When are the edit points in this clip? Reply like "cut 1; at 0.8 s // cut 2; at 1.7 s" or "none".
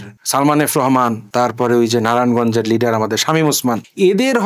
none